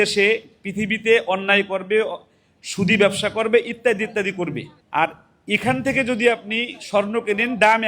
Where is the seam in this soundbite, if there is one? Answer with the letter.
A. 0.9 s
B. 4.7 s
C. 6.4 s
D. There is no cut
B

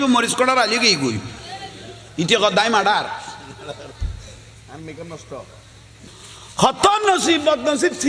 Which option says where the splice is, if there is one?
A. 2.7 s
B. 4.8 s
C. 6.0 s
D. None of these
C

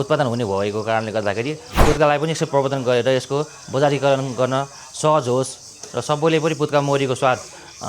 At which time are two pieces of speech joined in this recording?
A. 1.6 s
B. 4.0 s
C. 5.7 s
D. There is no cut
A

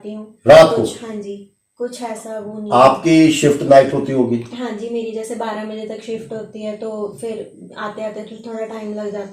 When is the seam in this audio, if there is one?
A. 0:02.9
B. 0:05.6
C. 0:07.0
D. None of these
D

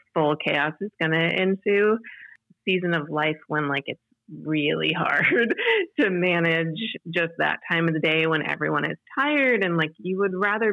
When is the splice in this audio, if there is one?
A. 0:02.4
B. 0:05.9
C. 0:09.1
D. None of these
A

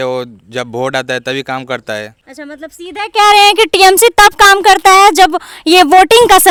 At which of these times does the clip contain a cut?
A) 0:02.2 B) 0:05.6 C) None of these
C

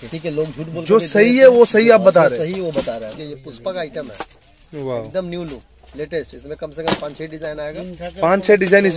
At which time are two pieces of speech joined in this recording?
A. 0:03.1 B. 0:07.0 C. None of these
A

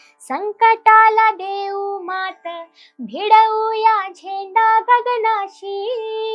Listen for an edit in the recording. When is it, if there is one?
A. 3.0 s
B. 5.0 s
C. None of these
C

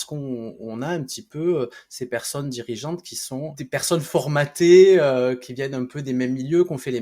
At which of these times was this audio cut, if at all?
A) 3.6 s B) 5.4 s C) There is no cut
A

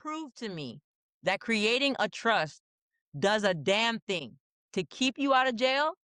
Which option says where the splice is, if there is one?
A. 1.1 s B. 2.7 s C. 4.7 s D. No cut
D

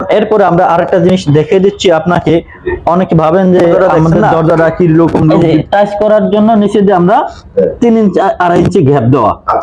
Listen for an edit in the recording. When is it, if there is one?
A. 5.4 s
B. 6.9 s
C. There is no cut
A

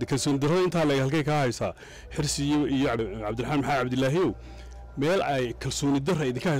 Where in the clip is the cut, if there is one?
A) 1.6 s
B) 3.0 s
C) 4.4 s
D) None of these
B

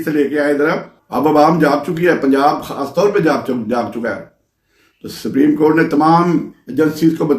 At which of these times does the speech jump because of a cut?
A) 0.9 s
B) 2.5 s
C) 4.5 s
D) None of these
A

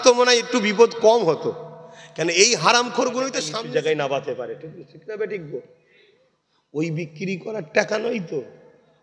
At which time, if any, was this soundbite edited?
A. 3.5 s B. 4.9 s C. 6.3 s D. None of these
A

